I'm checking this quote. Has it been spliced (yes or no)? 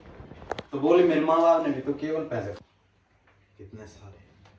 yes